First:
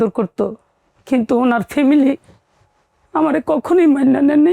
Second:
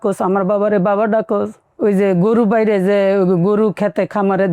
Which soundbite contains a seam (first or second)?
second